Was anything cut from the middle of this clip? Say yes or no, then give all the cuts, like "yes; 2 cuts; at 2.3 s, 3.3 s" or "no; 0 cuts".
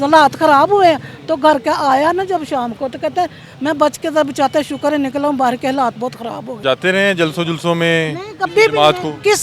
yes; 1 cut; at 6.5 s